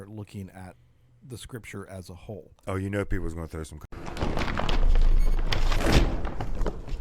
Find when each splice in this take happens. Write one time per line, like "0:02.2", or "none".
0:03.8